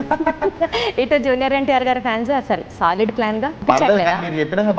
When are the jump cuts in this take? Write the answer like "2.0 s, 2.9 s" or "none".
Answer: 3.6 s